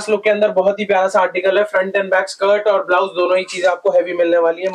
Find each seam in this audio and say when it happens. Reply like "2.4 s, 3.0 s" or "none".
none